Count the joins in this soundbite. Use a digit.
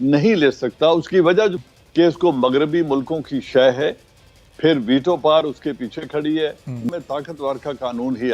2